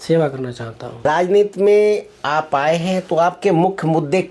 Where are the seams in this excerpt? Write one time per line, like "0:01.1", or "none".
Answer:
0:01.0
0:03.3

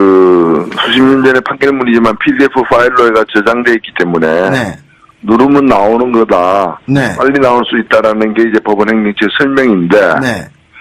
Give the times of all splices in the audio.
0:09.3

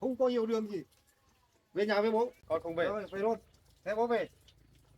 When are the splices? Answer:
0:02.4

